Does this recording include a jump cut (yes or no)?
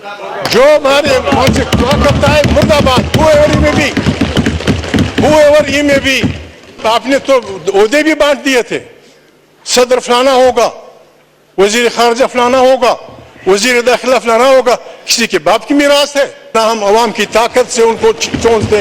yes